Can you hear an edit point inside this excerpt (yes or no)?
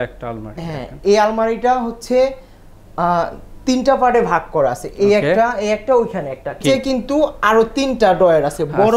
yes